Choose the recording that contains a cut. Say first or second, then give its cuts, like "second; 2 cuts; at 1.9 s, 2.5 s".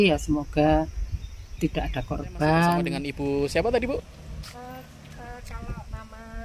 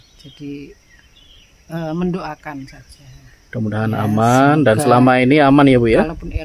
first; 1 cut; at 3.0 s